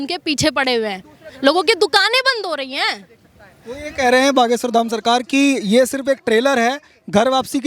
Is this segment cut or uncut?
uncut